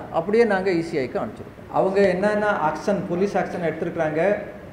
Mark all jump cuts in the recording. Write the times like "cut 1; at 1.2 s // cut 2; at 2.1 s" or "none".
cut 1; at 1.6 s